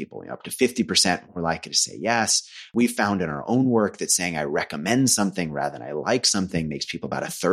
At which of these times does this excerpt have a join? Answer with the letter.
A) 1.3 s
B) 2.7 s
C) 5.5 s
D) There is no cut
B